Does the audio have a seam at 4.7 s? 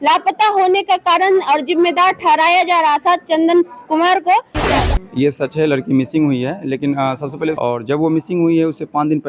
yes; 2 cuts; at 4.7 s, 7.6 s

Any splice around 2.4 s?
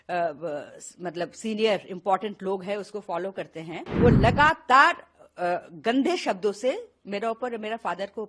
no; 1 cut; at 3.8 s

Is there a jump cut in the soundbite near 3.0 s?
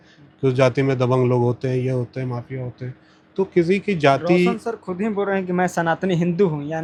no; 0 cuts

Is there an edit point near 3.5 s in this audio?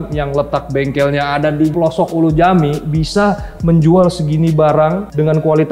no; 1 cut; at 1.7 s

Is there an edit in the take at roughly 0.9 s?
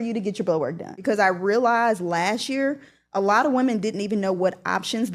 yes; 1 cut; at 0.9 s

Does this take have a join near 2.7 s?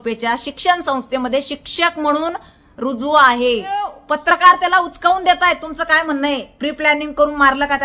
no; 1 cut; at 4.0 s

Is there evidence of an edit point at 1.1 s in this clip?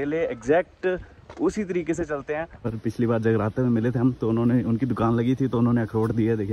no; 1 cut; at 2.7 s

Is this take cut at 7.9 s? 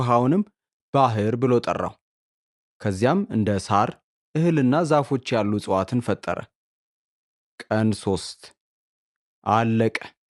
no; 0 cuts

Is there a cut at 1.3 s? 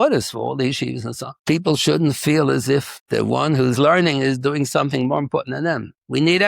yes; 2 cuts; at 1.3 s, 3.0 s

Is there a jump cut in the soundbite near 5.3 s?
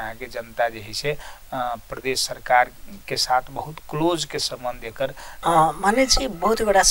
yes; 1 cut; at 5.3 s

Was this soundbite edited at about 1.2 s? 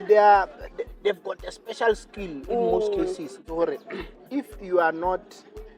no; 1 cut; at 3.4 s

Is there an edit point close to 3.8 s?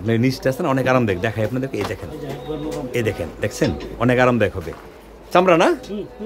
no; 0 cuts

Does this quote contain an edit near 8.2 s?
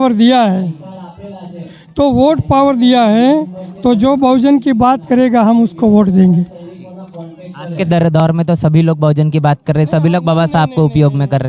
no; 0 cuts

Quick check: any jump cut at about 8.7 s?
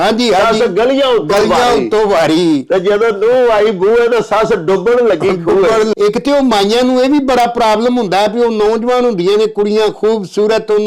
no; 1 cut; at 5.9 s

